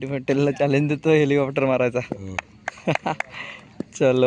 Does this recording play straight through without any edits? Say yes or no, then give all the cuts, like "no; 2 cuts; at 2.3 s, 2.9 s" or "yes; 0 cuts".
yes; 0 cuts